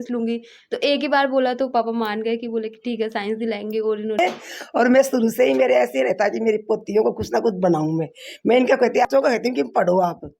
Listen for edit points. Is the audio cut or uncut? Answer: cut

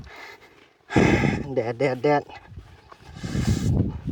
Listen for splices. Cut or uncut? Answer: uncut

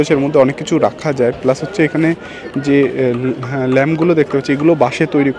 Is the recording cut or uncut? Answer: uncut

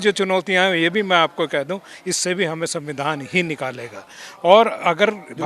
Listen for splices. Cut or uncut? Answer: uncut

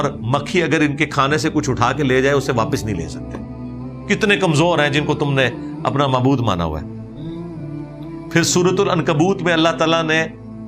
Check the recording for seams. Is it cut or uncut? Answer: uncut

